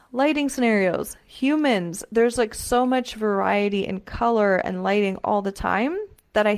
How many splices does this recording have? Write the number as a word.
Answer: zero